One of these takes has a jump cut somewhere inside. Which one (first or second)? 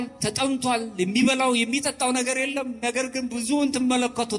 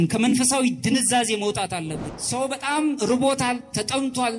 second